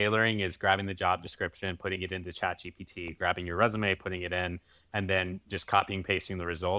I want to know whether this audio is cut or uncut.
uncut